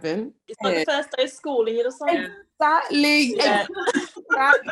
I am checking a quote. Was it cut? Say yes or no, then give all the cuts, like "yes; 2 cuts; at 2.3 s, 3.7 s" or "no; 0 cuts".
no; 0 cuts